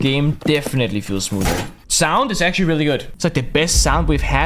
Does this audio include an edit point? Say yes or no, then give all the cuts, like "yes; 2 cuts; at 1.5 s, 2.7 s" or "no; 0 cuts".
yes; 2 cuts; at 1.8 s, 3.1 s